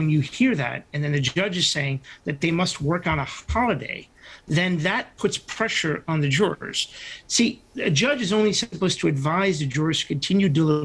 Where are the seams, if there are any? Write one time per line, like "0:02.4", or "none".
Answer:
none